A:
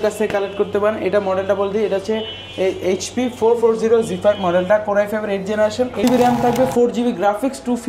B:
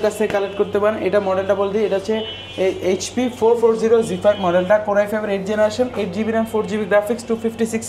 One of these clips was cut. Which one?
A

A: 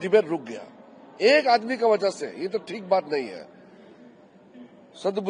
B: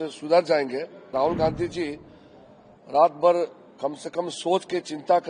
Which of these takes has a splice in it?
B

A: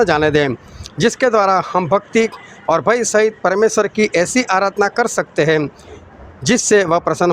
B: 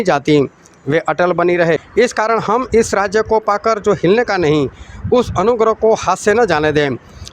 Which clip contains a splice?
B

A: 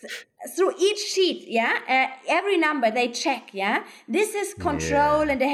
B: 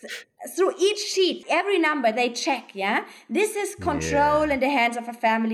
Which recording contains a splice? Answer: B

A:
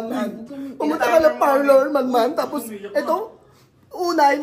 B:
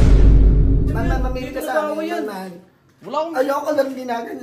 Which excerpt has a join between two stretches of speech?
B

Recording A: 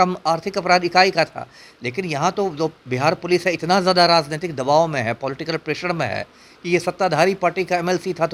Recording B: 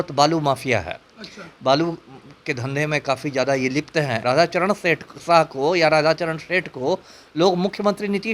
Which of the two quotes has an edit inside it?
B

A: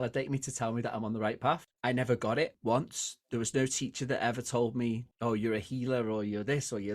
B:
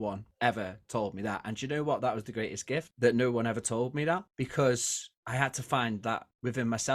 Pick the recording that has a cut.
A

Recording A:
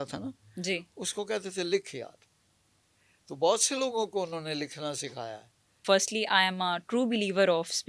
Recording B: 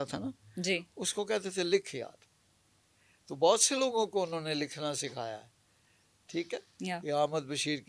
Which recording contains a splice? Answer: A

